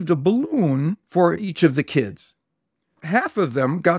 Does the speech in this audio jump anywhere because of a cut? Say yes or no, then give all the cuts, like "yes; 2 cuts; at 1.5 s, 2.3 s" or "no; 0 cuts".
yes; 2 cuts; at 1.0 s, 3.0 s